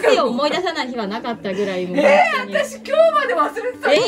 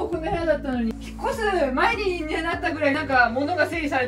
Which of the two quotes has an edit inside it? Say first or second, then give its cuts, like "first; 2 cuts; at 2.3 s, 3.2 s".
second; 1 cut; at 0.9 s